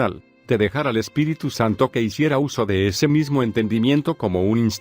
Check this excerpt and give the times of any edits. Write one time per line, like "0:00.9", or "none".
0:02.2